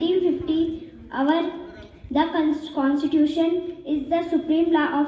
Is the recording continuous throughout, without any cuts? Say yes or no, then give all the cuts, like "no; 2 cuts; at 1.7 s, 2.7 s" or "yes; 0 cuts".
yes; 0 cuts